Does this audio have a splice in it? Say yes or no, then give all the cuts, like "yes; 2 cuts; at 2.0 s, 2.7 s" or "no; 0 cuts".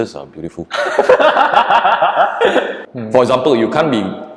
yes; 1 cut; at 2.8 s